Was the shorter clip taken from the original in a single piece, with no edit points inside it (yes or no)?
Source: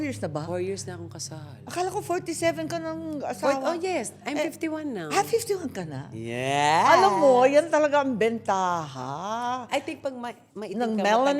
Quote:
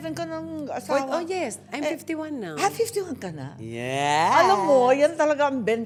yes